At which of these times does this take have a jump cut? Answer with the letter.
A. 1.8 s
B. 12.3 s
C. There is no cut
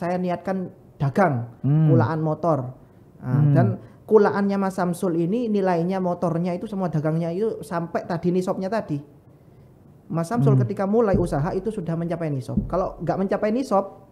C